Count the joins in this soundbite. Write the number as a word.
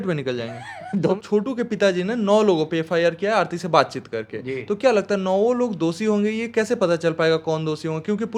one